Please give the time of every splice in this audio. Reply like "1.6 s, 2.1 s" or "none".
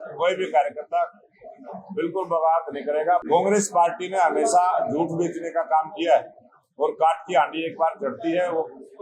3.2 s